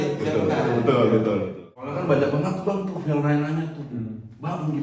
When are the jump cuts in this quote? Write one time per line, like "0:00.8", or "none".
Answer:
0:01.6